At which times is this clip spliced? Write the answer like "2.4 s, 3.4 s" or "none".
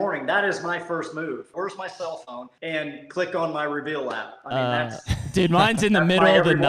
1.5 s, 2.5 s